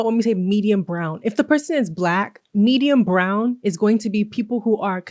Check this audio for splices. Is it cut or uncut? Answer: uncut